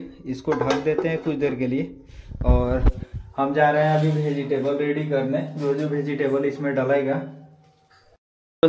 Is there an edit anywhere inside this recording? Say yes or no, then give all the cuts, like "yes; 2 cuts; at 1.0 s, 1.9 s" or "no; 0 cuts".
no; 0 cuts